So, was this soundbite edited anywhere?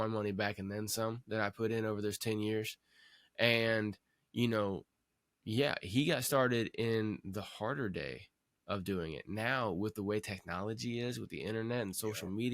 no; 0 cuts

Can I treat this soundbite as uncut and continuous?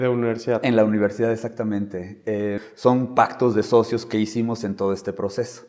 no; 1 cut; at 2.6 s

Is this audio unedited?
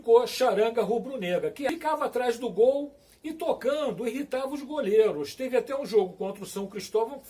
no; 1 cut; at 1.7 s

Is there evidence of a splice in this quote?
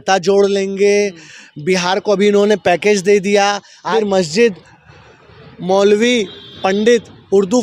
yes; 1 cut; at 3.9 s

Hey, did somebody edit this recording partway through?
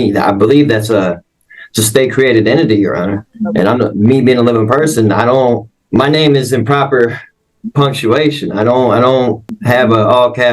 yes; 3 cuts; at 3.3 s, 5.7 s, 9.6 s

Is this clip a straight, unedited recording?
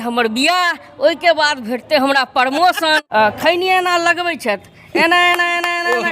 no; 1 cut; at 3.0 s

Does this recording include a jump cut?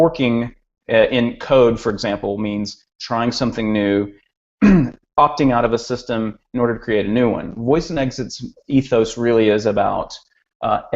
yes; 1 cut; at 9.6 s

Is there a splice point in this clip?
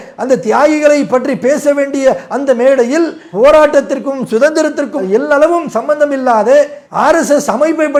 no; 0 cuts

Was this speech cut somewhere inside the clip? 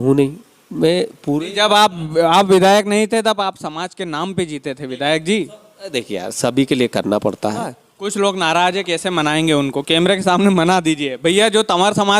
yes; 1 cut; at 7.8 s

